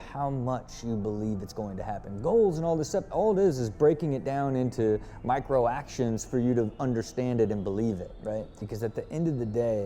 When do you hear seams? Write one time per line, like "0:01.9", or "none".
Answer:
0:08.6